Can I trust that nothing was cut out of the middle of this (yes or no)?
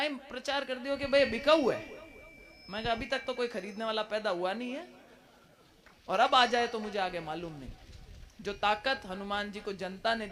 yes